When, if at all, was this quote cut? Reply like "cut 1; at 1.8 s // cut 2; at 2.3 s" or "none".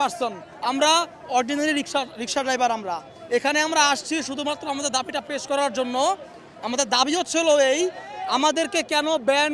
none